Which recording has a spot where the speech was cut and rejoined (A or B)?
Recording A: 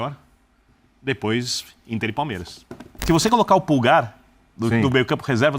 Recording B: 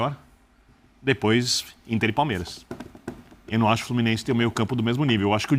A